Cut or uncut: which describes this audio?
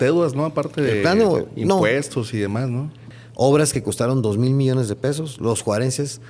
cut